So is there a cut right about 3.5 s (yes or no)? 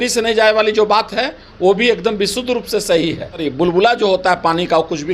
yes